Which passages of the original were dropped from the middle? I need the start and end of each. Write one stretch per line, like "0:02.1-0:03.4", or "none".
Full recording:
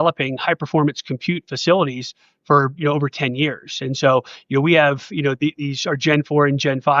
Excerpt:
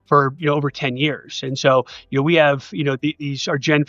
none